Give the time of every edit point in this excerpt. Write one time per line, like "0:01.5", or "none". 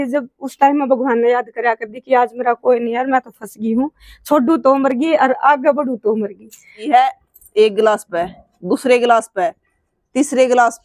0:06.8